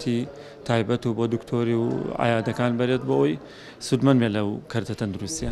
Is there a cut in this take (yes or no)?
no